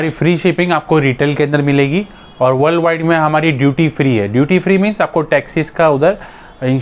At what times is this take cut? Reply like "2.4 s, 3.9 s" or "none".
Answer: none